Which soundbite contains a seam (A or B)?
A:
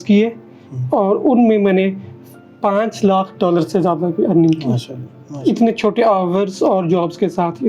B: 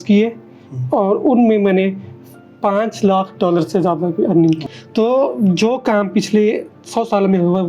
B